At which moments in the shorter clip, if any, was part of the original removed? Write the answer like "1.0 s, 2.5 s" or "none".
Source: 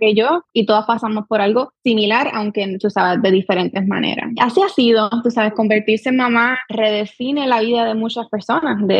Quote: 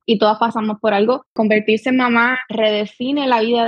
1.3 s